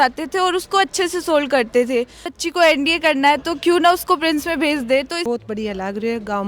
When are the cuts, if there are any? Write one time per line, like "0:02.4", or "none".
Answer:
0:02.3
0:05.2